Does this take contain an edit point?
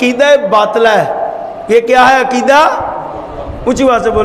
no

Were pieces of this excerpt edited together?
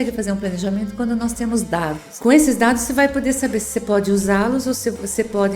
yes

